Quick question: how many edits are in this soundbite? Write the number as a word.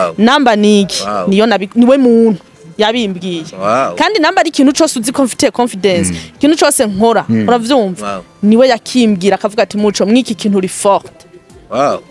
zero